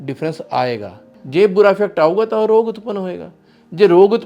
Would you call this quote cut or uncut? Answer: cut